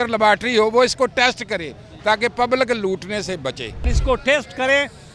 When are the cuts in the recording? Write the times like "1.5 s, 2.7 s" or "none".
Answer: 3.9 s